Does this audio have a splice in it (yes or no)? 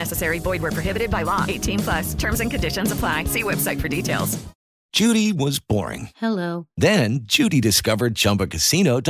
yes